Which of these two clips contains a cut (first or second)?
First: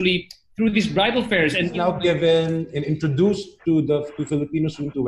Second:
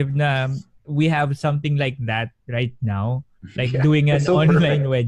first